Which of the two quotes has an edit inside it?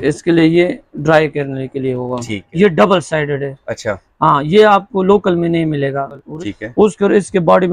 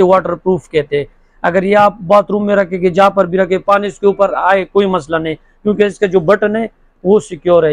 first; 2 cuts; at 2.3 s, 6.2 s

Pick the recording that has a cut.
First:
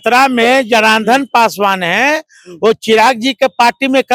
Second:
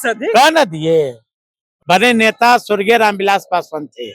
second; 1 cut; at 1.7 s

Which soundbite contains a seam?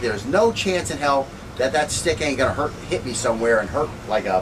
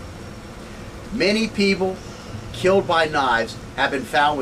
first; 1 cut; at 2.8 s

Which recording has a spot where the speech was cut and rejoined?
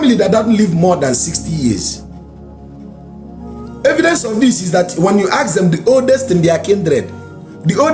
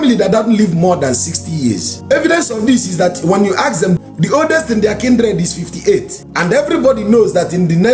second; 3 cuts; at 1.9 s, 4.0 s, 6.2 s

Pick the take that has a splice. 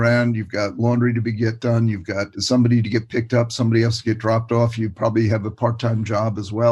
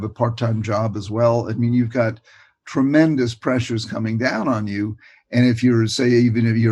first; 1 cut; at 2.4 s

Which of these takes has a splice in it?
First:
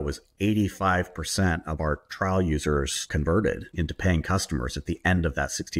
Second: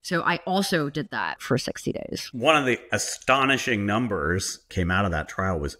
second; 1 cut; at 1.4 s

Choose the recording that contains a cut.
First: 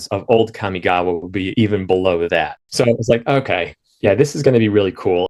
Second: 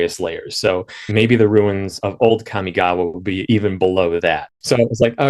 second; 1 cut; at 1.0 s

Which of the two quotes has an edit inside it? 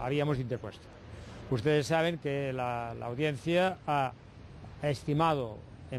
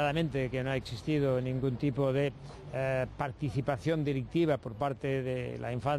second; 1 cut; at 3.7 s

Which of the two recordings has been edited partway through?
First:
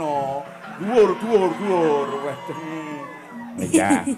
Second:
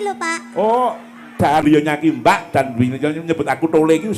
second; 1 cut; at 1.6 s

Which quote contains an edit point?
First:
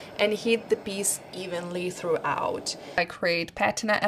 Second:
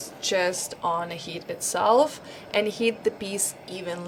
first; 1 cut; at 3.0 s

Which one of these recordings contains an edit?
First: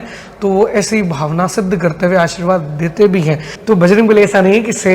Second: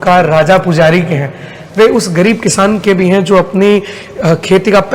first; 1 cut; at 3.5 s

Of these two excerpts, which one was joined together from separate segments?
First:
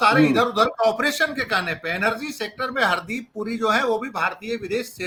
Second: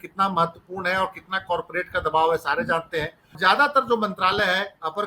second; 1 cut; at 3.2 s

